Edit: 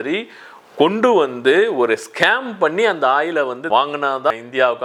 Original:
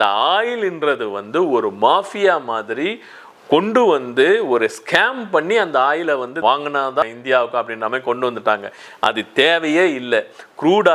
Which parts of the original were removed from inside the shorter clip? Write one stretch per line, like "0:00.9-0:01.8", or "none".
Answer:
none

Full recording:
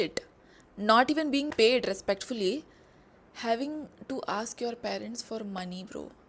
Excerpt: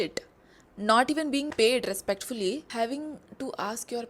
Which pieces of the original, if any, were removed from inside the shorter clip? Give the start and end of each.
0:02.7-0:03.4

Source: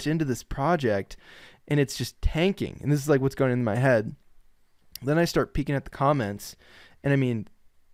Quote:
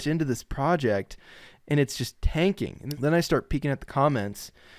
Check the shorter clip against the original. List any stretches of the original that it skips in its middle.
0:02.7-0:04.8

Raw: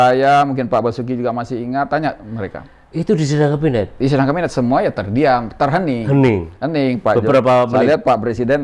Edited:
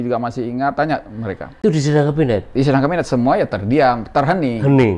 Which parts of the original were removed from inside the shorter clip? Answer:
0:02.7-0:03.0

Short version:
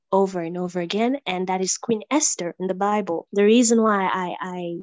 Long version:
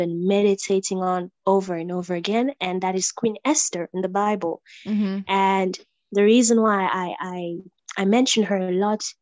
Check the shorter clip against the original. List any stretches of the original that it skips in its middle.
0:04.6-0:06.0

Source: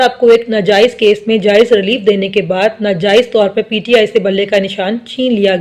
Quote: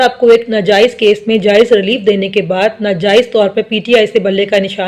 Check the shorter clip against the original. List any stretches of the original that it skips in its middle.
none

